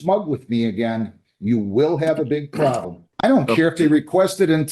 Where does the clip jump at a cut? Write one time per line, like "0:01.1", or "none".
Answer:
0:03.0